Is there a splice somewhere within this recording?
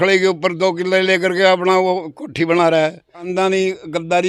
yes; 1 cut; at 3.3 s

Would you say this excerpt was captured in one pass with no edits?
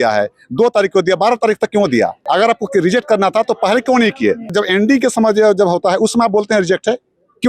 no; 2 cuts; at 2.2 s, 4.5 s

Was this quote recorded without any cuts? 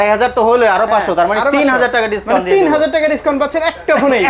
yes; 0 cuts

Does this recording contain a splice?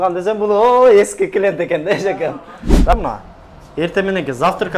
yes; 1 cut; at 2.9 s

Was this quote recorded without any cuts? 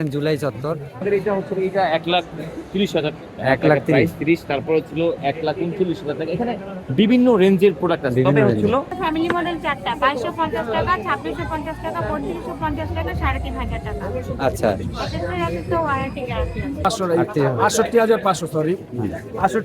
no; 3 cuts; at 1.0 s, 8.9 s, 16.8 s

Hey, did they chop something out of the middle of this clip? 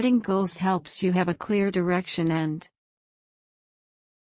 no; 0 cuts

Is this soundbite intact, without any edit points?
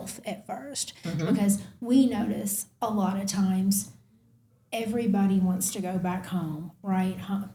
yes; 0 cuts

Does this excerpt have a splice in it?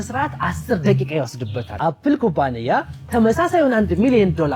yes; 1 cut; at 1.8 s

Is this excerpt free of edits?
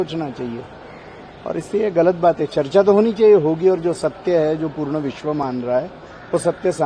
yes; 0 cuts

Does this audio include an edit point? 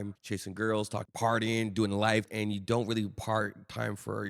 yes; 1 cut; at 2.3 s

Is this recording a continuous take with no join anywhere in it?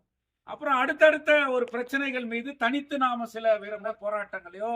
no; 1 cut; at 3.8 s

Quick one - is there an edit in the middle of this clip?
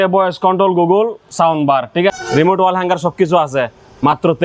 yes; 1 cut; at 2.2 s

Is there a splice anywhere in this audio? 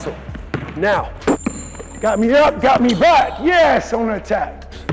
yes; 1 cut; at 1.3 s

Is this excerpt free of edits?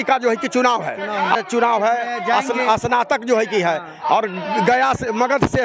no; 1 cut; at 1.4 s

